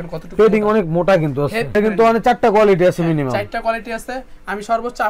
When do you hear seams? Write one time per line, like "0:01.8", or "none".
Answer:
0:01.8